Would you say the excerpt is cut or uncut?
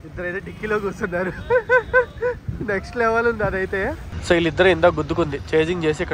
cut